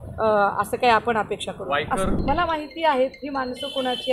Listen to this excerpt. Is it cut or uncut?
cut